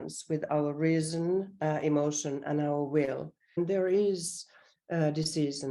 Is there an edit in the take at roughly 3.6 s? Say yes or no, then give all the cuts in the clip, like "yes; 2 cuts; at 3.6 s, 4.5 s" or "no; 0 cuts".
yes; 1 cut; at 3.6 s